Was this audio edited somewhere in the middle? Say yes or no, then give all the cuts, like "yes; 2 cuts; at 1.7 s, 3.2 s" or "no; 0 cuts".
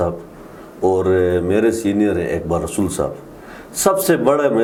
no; 0 cuts